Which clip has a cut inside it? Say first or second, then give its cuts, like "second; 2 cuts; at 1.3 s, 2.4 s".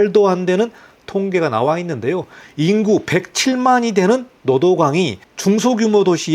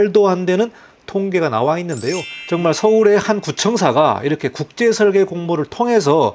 second; 1 cut; at 2.3 s